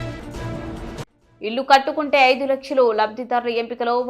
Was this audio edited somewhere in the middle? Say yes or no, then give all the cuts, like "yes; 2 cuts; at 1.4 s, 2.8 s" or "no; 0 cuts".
yes; 1 cut; at 1.0 s